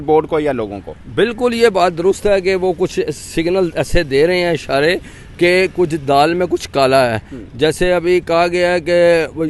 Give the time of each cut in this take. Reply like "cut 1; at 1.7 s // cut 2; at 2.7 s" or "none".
none